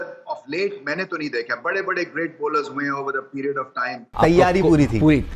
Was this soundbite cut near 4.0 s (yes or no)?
yes